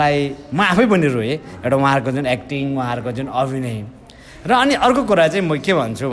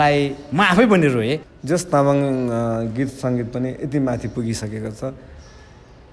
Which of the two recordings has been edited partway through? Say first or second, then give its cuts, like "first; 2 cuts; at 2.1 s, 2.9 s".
second; 1 cut; at 1.5 s